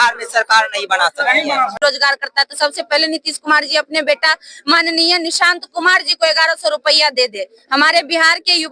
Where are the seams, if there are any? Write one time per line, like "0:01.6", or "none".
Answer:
0:01.8